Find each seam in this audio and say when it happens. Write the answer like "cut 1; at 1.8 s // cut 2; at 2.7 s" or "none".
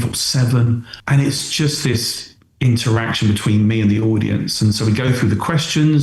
cut 1; at 0.9 s